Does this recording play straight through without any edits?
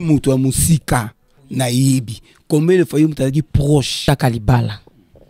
no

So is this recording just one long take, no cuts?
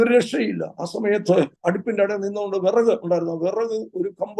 no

